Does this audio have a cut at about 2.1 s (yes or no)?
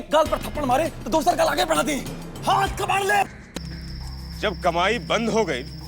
no